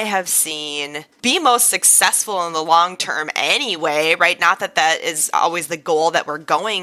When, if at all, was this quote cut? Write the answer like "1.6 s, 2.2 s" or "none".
1.1 s